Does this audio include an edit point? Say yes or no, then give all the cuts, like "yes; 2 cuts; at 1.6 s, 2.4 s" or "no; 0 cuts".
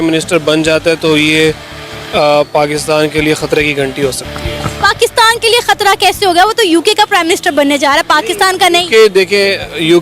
no; 0 cuts